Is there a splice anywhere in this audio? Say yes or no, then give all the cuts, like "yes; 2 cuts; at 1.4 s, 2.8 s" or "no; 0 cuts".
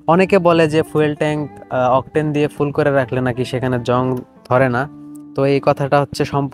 no; 0 cuts